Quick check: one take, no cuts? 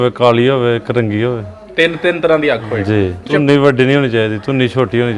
no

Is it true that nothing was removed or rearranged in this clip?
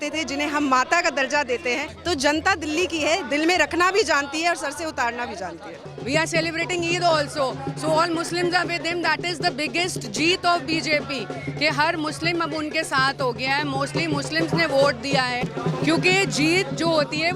no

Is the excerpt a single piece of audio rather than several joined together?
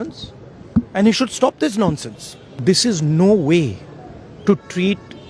no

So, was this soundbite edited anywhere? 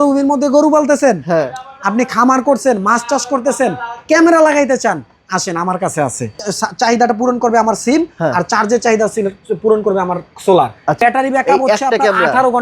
yes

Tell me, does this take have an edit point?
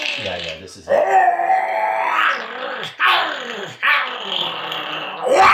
no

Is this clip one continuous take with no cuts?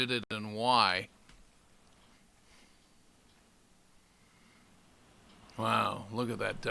no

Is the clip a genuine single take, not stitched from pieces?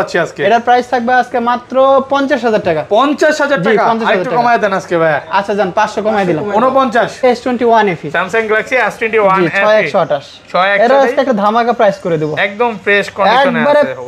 no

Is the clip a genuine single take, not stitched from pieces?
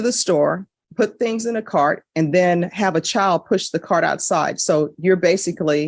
yes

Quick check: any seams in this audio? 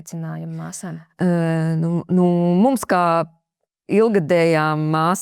no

